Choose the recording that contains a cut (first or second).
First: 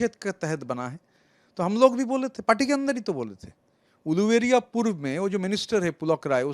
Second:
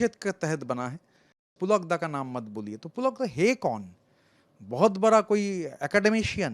second